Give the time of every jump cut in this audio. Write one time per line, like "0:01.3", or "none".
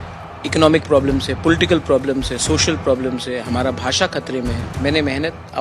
0:04.7